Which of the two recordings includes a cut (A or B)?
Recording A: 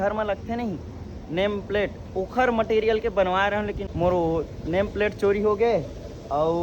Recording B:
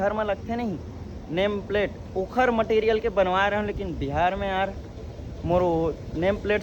A